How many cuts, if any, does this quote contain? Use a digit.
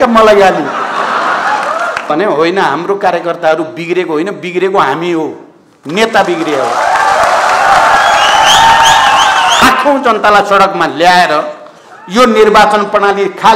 2